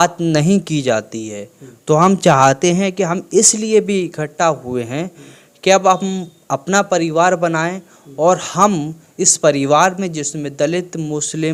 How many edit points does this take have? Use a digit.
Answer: 0